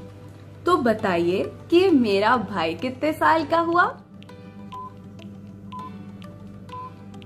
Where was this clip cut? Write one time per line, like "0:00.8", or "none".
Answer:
none